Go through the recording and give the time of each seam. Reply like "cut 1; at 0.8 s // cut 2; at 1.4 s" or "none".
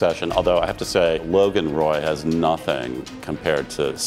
cut 1; at 1.2 s